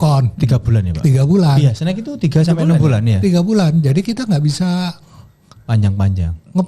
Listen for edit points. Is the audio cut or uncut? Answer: uncut